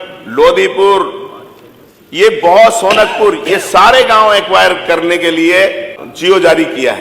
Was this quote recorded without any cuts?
yes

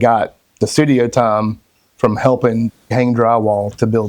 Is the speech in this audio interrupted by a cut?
no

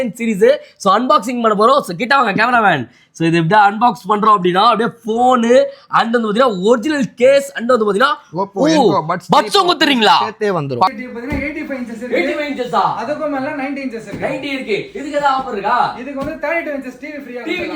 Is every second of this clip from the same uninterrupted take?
no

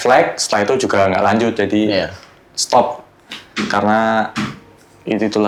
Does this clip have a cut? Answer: no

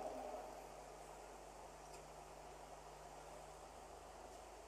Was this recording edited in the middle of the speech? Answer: no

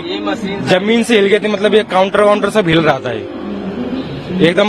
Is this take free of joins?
yes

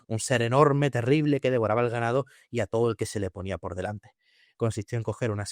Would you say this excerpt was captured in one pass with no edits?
no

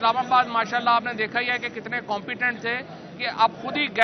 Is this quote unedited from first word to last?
yes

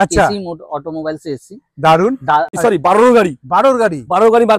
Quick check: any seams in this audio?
yes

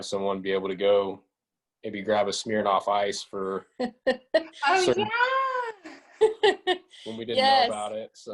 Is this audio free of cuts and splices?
yes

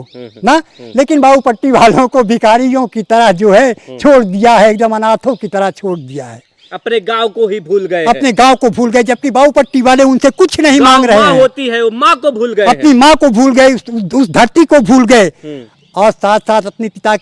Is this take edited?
no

